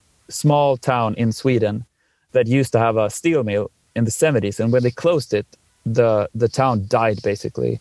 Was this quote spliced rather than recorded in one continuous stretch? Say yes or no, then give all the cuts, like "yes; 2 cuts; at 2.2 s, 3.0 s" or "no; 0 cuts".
no; 0 cuts